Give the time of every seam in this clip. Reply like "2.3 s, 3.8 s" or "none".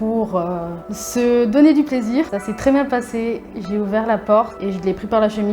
2.4 s